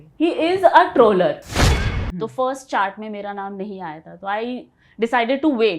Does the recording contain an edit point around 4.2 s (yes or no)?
no